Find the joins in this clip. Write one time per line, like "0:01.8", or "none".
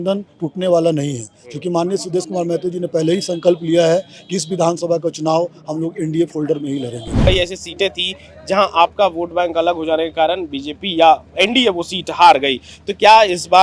0:07.3